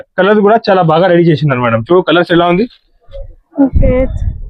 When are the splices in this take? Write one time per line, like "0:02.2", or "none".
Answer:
none